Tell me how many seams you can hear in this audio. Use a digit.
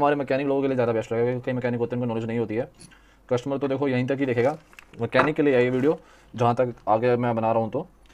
0